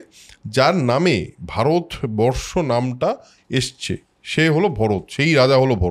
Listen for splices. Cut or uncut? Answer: uncut